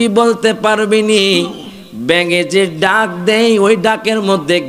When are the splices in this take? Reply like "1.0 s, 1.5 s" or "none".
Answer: none